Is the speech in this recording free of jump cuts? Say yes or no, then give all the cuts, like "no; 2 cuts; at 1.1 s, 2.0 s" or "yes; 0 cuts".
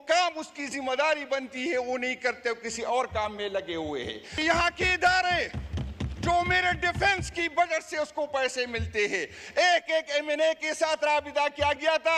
no; 1 cut; at 4.3 s